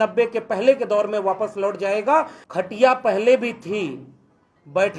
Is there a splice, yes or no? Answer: yes